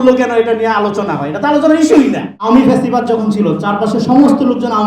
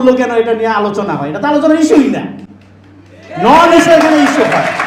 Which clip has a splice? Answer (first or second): first